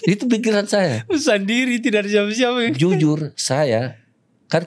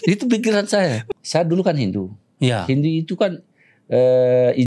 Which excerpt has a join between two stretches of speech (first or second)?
second